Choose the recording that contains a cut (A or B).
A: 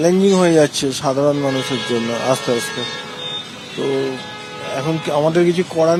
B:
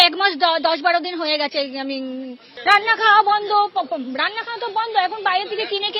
B